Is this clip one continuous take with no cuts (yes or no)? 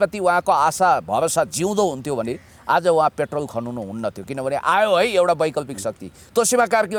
yes